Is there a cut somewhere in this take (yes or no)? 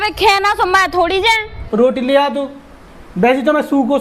yes